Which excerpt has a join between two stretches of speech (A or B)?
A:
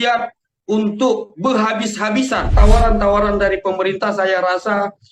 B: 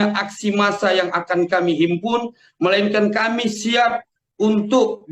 A